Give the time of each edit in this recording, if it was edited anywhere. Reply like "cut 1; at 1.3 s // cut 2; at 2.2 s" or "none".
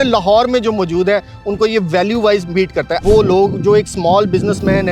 cut 1; at 3.0 s